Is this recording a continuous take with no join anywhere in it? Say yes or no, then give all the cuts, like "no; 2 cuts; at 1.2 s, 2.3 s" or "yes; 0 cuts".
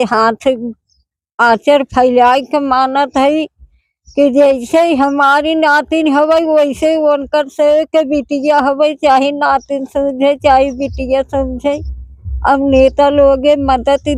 yes; 0 cuts